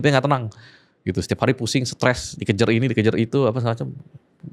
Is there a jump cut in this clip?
no; 0 cuts

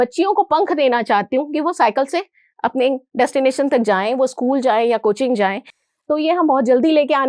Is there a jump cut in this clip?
no; 0 cuts

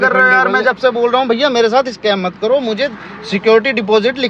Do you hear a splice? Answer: no; 0 cuts

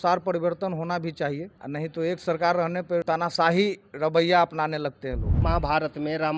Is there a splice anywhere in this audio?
yes; 3 cuts; at 1.5 s, 3.0 s, 5.3 s

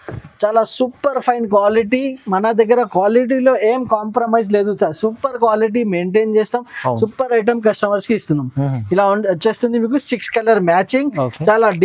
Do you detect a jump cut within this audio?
no; 0 cuts

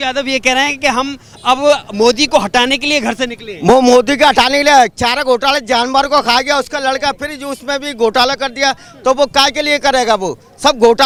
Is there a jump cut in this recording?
no; 0 cuts

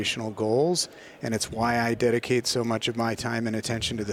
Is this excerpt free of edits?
yes; 0 cuts

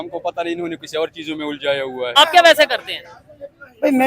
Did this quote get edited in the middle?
yes; 1 cut; at 2.1 s

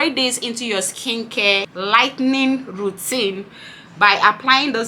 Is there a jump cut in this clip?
yes; 1 cut; at 1.7 s

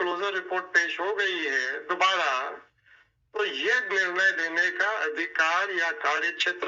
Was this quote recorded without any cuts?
yes; 0 cuts

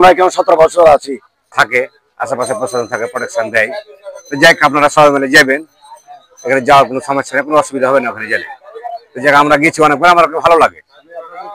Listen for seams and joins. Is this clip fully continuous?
no; 1 cut; at 1.5 s

